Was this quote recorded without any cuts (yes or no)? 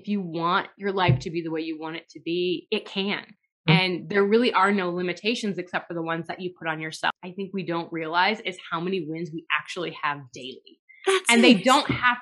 no